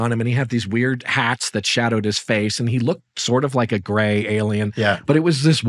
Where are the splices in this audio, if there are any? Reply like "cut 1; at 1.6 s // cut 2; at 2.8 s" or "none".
none